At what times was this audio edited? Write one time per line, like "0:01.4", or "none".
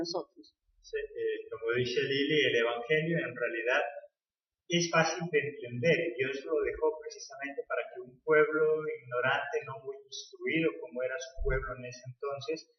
none